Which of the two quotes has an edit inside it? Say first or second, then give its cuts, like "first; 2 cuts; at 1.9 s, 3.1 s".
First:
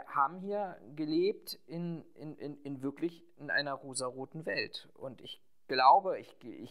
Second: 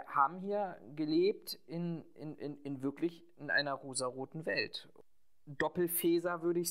second; 1 cut; at 4.8 s